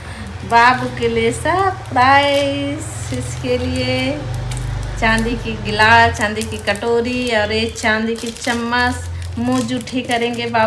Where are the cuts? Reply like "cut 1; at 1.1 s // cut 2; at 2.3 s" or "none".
none

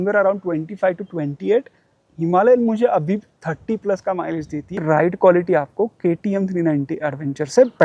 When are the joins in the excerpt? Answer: cut 1; at 4.8 s

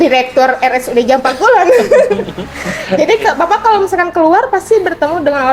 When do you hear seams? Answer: none

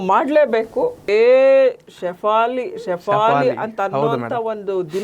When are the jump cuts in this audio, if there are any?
cut 1; at 1.1 s

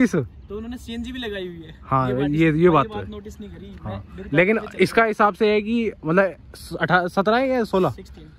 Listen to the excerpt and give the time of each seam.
none

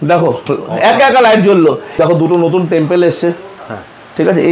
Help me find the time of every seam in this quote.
cut 1; at 1.9 s

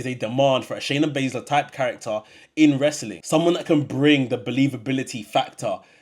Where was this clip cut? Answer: cut 1; at 3.1 s

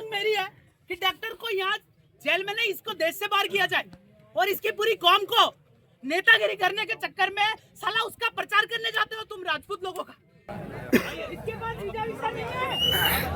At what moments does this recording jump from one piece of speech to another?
cut 1; at 10.5 s

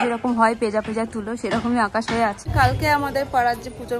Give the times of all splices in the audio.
cut 1; at 2.4 s

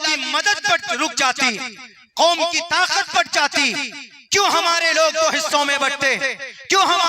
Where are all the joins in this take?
none

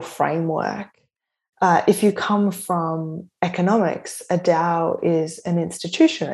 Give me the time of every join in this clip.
none

